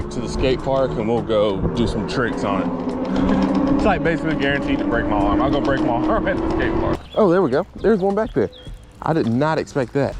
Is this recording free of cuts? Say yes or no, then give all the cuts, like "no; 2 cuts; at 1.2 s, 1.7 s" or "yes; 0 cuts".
no; 1 cut; at 7.0 s